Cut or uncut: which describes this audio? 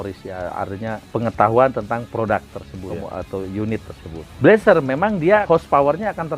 cut